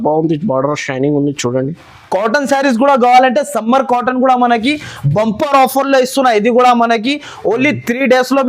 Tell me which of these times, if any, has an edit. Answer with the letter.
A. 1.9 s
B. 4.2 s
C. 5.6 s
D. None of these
A